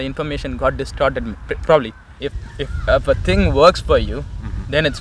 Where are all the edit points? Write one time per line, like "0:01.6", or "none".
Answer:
0:02.1